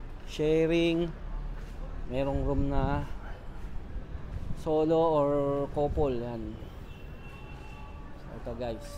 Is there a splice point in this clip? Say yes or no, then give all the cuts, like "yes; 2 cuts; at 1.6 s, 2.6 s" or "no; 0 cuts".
no; 0 cuts